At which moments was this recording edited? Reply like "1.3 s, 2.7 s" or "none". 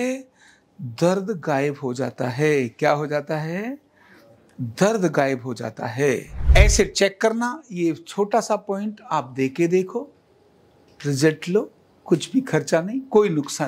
6.5 s